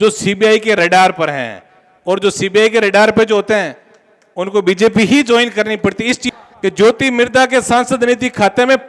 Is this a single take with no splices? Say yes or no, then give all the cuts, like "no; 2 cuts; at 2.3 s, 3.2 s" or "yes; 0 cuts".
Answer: no; 1 cut; at 6.3 s